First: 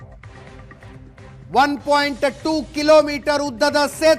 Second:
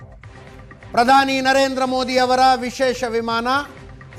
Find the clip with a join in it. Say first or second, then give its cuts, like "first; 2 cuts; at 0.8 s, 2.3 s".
second; 1 cut; at 0.9 s